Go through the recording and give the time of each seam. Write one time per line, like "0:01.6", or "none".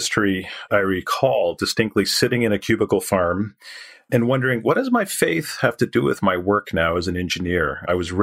none